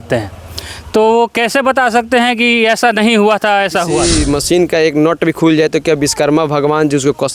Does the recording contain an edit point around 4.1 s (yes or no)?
yes